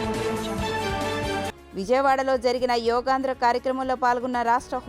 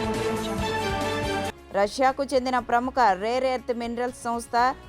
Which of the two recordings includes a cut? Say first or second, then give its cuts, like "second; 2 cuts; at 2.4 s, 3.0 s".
second; 1 cut; at 1.6 s